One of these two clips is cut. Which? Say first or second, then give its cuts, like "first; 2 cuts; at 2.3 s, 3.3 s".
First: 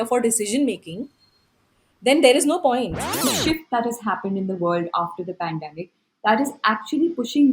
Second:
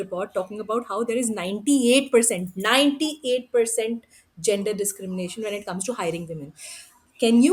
first; 1 cut; at 3.2 s